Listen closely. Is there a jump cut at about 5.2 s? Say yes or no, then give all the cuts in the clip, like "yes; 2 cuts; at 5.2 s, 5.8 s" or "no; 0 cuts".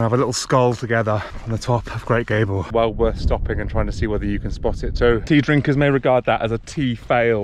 yes; 3 cuts; at 1.3 s, 2.7 s, 5.2 s